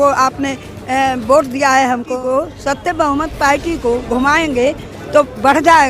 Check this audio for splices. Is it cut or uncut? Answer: cut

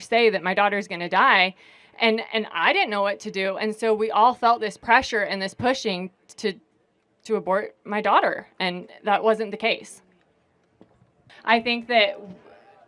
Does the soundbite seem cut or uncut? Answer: cut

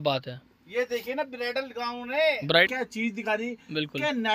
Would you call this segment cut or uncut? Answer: cut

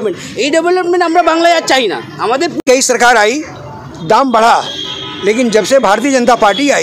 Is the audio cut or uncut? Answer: cut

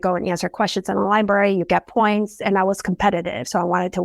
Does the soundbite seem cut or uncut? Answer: cut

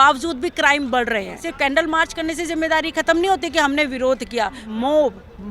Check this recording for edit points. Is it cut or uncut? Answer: cut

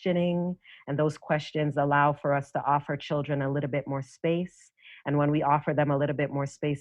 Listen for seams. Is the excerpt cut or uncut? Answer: uncut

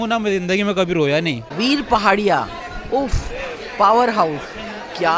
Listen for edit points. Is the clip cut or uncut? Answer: cut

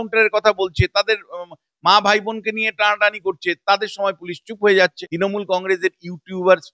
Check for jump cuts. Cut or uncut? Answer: cut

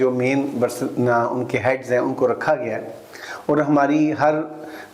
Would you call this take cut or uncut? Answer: uncut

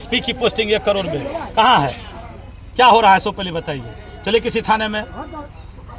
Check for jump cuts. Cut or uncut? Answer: uncut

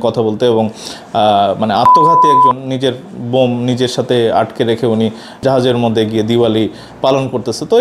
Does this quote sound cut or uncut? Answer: cut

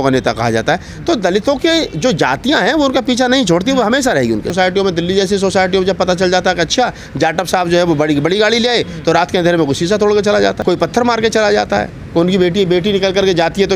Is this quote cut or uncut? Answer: cut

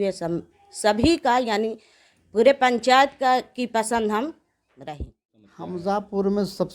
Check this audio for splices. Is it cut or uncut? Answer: cut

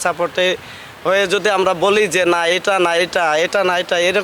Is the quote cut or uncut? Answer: uncut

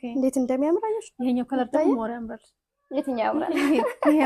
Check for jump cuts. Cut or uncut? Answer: uncut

